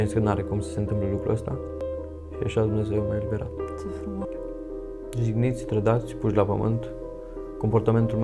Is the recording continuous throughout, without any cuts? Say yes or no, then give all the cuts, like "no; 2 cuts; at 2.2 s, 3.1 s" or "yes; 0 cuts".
no; 2 cuts; at 1.8 s, 4.2 s